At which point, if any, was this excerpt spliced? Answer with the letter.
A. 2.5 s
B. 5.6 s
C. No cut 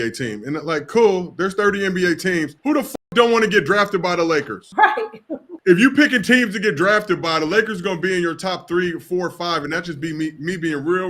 B